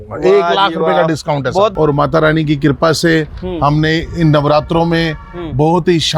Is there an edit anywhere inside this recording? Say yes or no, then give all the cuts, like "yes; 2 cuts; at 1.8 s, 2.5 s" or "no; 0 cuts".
yes; 1 cut; at 1.7 s